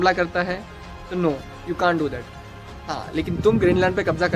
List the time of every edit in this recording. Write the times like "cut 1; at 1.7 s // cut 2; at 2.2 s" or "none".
none